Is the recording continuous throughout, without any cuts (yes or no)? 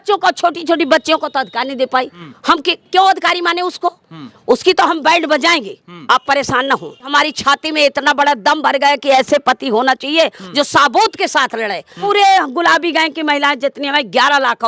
no